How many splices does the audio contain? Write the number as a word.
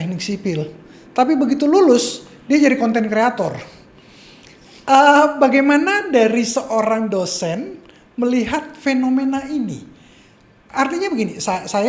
zero